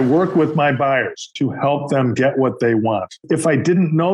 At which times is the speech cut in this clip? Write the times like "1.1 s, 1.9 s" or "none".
1.2 s, 3.1 s